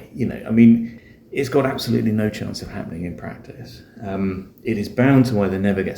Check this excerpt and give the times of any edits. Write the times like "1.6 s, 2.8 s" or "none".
0.9 s